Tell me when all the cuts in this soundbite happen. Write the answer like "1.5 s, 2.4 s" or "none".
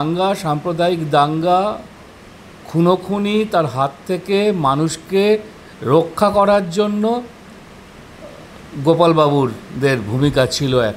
none